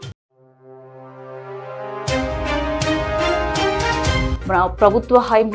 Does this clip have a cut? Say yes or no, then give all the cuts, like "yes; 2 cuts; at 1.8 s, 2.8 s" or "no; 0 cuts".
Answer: yes; 1 cut; at 4.3 s